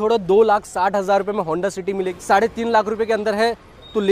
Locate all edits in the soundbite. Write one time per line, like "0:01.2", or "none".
0:02.2